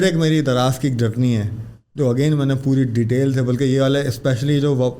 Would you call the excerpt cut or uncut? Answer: uncut